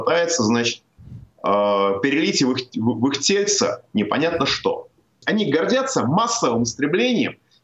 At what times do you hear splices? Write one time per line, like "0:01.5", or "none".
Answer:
0:05.2